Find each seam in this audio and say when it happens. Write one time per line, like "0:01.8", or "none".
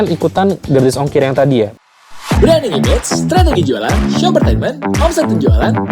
0:01.8